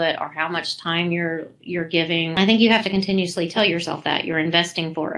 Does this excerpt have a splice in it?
yes; 2 cuts; at 2.4 s, 3.5 s

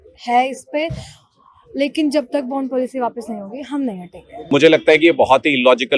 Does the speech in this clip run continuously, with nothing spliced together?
no; 1 cut; at 4.5 s

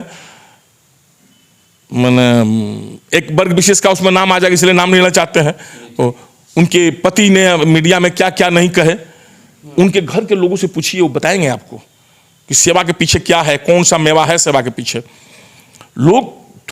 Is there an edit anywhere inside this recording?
no; 0 cuts

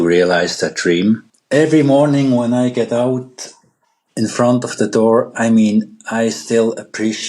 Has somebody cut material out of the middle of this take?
yes; 1 cut; at 1.3 s

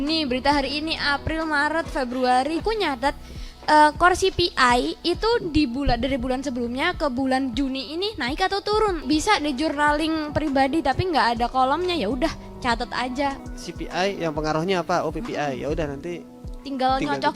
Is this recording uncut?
no; 3 cuts; at 2.6 s, 9.0 s, 13.4 s

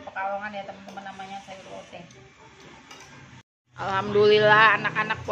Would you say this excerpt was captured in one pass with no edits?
no; 1 cut; at 3.4 s

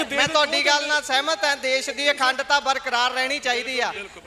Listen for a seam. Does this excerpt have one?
no; 0 cuts

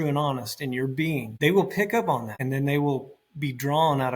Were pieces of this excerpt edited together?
yes; 2 cuts; at 1.3 s, 2.3 s

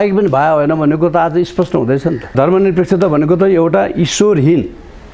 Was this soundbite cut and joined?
yes; 1 cut; at 2.3 s

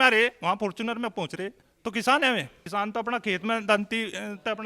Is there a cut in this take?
yes; 2 cuts; at 1.6 s, 2.6 s

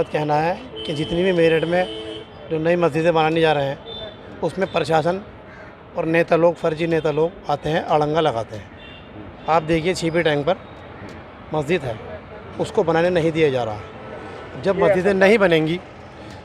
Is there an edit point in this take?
no; 0 cuts

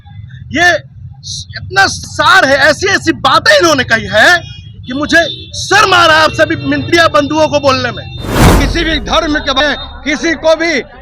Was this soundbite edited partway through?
yes; 1 cut; at 8.5 s

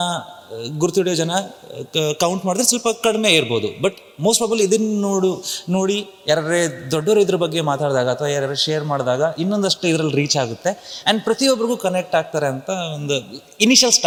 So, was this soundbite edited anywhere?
no; 0 cuts

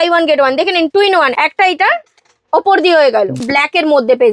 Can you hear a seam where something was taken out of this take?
yes; 2 cuts; at 1.3 s, 3.4 s

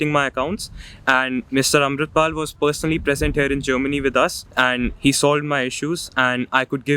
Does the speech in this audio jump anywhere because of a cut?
yes; 1 cut; at 4.4 s

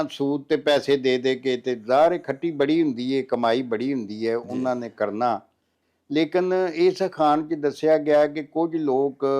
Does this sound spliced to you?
no; 0 cuts

